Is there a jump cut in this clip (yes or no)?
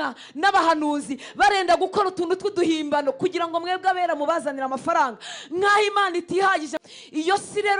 yes